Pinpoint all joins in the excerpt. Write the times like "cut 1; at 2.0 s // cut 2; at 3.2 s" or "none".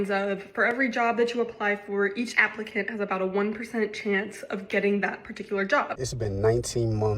cut 1; at 5.9 s